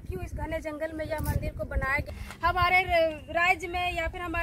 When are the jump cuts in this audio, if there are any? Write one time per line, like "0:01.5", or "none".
0:02.1